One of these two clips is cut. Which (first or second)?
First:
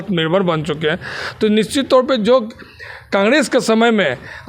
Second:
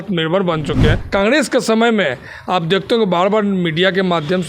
second